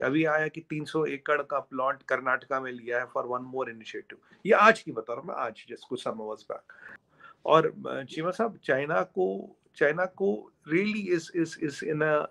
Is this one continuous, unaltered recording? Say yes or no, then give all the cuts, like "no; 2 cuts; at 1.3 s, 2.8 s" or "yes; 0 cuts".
yes; 0 cuts